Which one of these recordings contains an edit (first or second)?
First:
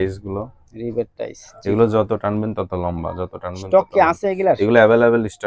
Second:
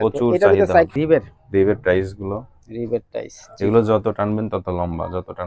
second